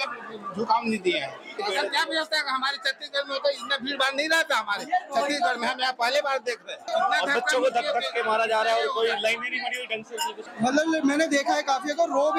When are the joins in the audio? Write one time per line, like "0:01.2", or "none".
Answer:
0:01.6
0:06.8
0:10.4